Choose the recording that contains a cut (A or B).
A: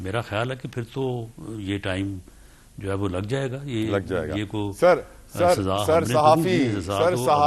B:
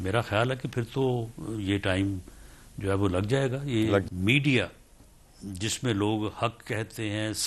B